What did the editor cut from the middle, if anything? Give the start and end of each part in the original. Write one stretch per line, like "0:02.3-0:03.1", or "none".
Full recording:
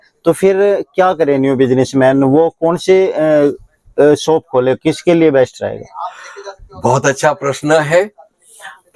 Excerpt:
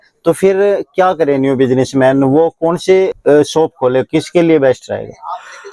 0:03.1-0:03.9